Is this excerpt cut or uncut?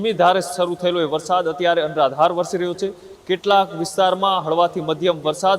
uncut